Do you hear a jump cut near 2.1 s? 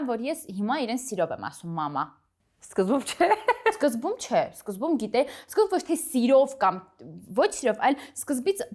no; 0 cuts

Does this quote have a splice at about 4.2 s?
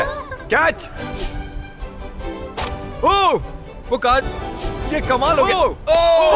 yes; 1 cut; at 4.2 s

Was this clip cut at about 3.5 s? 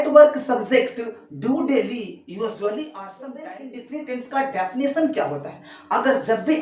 yes; 1 cut; at 3.5 s

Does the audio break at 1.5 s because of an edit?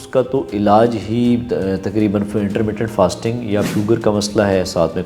no; 1 cut; at 3.7 s

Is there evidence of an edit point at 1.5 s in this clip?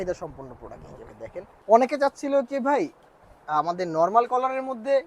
yes; 1 cut; at 1.5 s

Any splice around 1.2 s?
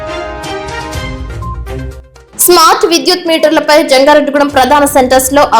yes; 1 cut; at 1.2 s

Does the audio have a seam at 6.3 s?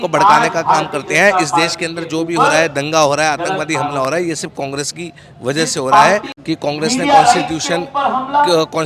yes; 1 cut; at 6.3 s

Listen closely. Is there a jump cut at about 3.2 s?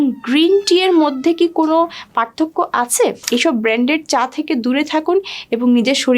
yes; 1 cut; at 3.2 s

